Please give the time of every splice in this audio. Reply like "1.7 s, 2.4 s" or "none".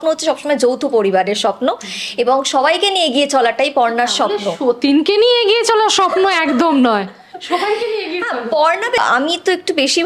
9.0 s